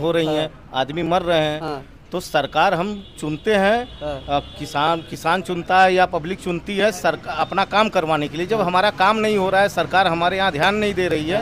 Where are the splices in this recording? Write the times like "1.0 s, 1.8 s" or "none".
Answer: none

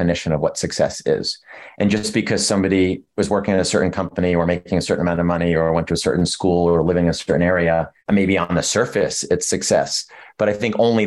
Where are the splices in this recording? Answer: none

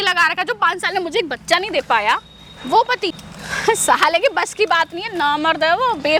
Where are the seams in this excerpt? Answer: none

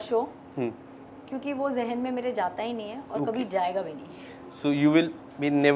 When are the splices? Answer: none

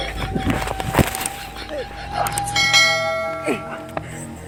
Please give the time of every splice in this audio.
none

